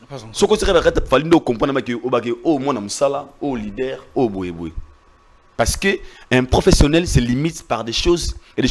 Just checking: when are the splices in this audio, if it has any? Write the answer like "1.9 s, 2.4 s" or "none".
none